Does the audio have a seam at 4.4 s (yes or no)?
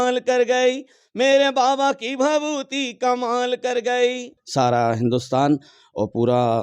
yes